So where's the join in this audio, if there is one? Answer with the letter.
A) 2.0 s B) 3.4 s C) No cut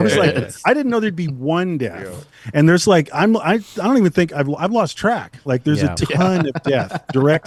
C